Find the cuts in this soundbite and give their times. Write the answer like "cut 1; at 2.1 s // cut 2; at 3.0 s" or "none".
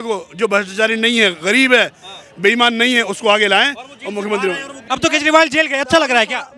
cut 1; at 4.8 s